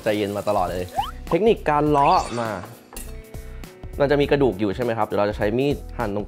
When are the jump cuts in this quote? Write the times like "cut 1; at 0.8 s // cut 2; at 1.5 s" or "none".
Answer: cut 1; at 1.2 s